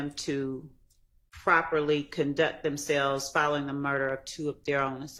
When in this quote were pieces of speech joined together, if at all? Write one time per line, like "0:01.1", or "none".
none